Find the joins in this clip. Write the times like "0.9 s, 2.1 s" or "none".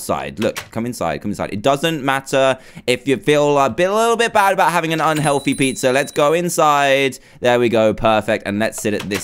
3.4 s